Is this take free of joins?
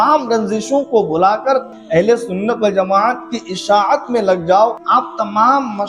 no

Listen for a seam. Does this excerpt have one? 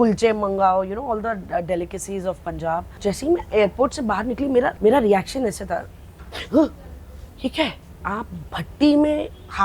yes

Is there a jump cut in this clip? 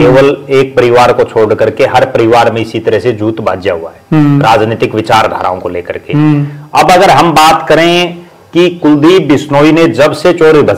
no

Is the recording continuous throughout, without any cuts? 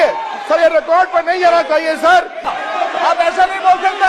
no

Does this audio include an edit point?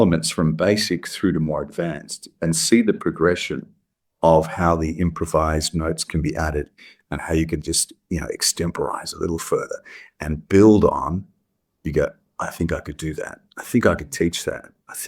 no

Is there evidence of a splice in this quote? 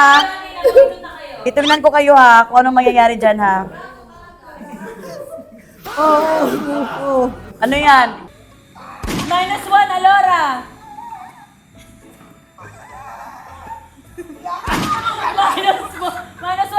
yes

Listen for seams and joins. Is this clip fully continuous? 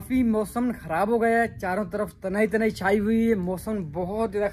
yes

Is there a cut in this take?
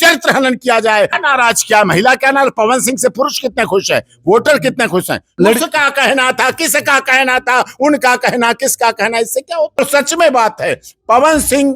yes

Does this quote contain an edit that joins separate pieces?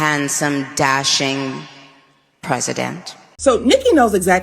yes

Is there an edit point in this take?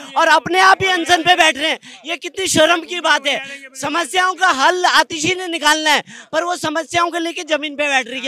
no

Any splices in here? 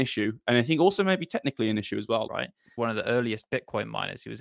yes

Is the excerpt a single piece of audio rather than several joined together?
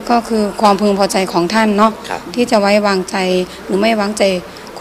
yes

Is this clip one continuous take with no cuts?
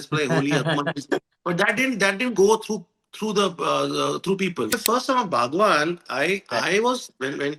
no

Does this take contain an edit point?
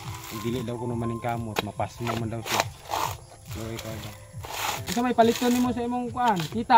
yes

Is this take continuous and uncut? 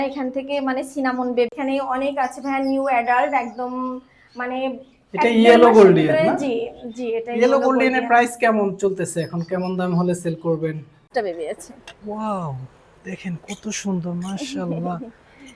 no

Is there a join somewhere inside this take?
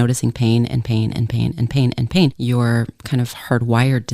yes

